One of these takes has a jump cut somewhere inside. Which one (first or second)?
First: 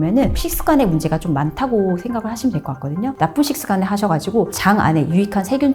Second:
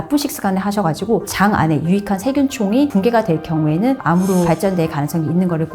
second